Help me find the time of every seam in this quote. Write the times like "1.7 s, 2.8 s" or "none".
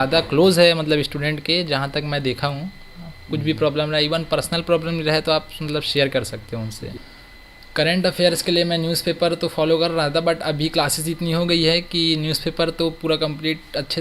6.9 s